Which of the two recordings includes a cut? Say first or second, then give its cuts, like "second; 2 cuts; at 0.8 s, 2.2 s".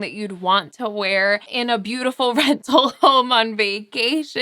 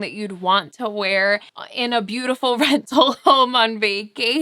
first; 1 cut; at 1.5 s